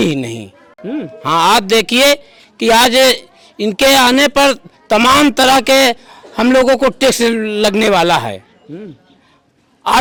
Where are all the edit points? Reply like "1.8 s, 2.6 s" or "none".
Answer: none